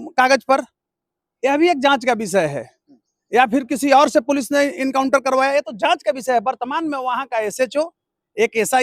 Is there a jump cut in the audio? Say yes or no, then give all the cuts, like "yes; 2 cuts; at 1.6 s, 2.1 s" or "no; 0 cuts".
no; 0 cuts